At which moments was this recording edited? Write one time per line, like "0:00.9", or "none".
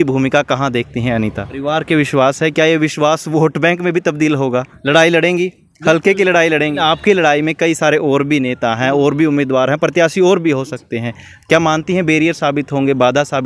0:01.5
0:04.7
0:06.8

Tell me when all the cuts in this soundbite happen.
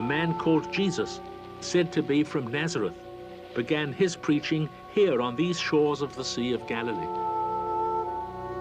0:07.6

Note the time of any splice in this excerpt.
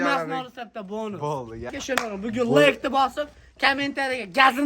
0:01.7

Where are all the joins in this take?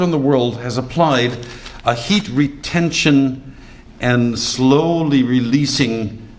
none

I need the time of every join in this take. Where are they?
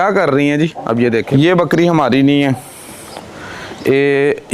0:01.3

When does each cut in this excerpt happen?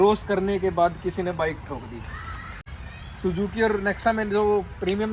0:02.5

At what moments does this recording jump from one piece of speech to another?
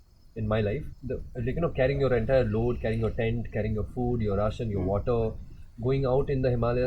0:00.9

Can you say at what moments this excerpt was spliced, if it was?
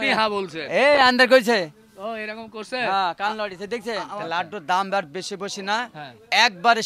0:04.1

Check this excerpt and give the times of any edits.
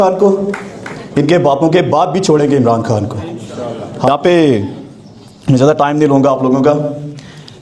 0:04.0

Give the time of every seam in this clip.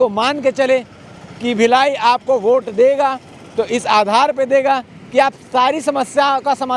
none

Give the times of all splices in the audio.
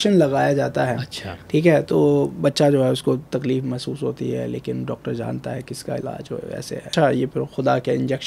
0:06.9

